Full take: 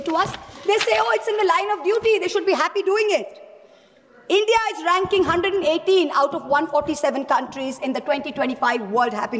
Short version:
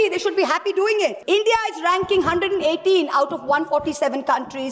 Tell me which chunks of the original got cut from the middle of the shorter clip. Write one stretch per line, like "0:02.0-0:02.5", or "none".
0:03.3-0:04.2